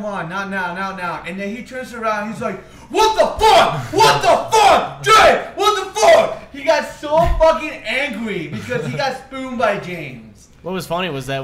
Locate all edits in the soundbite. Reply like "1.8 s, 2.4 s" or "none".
4.8 s